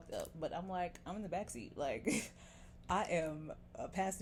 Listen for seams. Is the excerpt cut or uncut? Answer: uncut